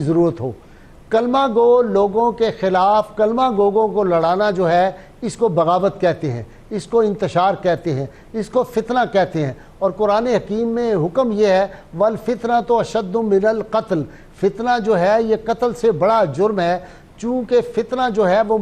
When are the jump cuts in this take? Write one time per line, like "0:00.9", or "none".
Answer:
none